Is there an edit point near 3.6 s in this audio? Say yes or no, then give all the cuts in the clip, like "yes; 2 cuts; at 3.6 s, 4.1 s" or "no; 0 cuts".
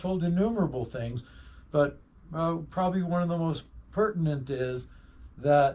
yes; 1 cut; at 3.6 s